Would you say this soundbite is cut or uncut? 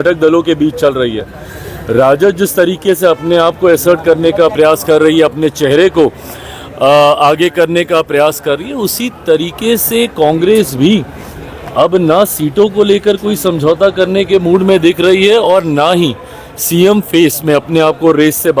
uncut